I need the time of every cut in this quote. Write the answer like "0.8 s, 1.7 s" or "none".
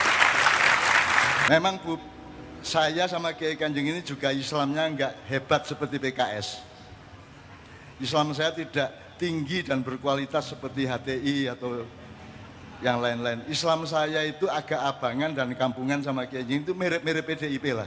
1.5 s